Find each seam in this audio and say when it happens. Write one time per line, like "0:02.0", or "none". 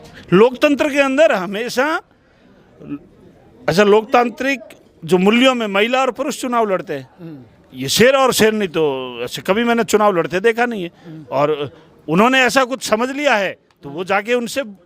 none